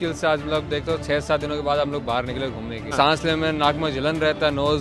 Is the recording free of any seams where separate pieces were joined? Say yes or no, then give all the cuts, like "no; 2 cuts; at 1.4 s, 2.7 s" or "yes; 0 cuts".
no; 1 cut; at 2.9 s